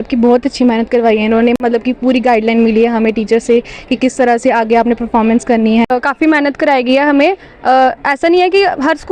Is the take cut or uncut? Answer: cut